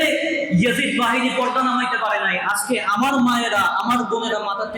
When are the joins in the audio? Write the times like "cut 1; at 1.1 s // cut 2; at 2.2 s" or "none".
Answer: none